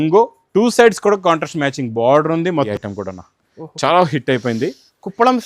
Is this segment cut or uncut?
cut